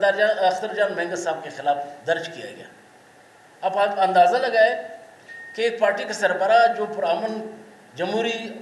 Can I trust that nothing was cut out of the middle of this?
yes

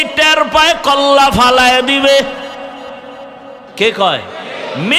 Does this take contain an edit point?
yes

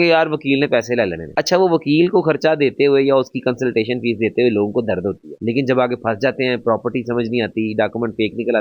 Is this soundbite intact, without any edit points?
yes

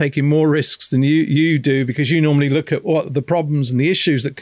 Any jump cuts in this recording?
no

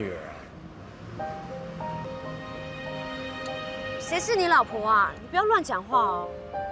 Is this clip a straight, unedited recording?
no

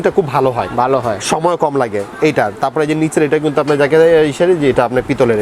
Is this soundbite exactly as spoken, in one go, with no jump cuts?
yes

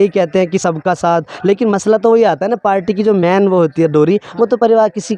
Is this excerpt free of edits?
yes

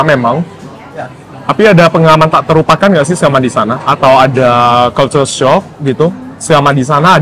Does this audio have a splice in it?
no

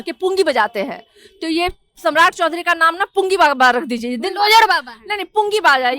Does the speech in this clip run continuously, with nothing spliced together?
yes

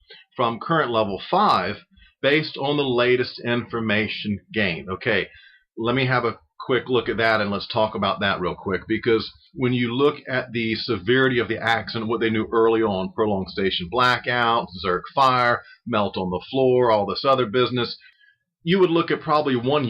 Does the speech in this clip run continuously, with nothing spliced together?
no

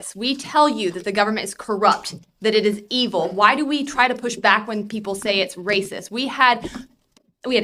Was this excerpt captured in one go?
yes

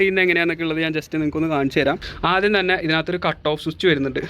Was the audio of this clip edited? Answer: yes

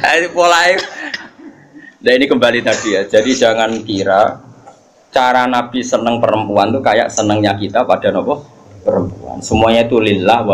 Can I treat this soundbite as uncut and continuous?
yes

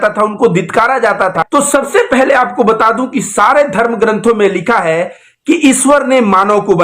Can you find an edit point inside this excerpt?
yes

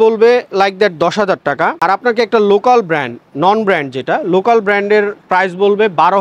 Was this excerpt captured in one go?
yes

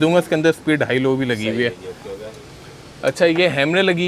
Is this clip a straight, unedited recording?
yes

